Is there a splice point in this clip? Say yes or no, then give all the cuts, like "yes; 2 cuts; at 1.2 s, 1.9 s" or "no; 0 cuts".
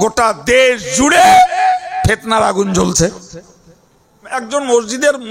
yes; 1 cut; at 4.4 s